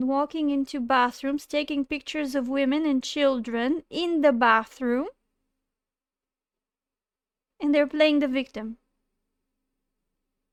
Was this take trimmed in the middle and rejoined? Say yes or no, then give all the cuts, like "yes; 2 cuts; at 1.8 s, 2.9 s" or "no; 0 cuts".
no; 0 cuts